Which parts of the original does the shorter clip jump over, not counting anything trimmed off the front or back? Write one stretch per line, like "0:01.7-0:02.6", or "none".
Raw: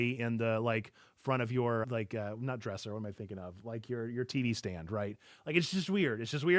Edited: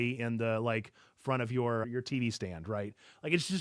0:01.9-0:04.1